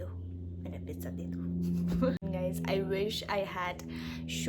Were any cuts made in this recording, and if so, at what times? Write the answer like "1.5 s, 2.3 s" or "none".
2.2 s